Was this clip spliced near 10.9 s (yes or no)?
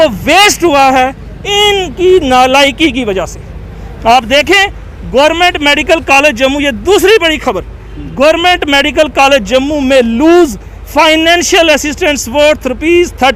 no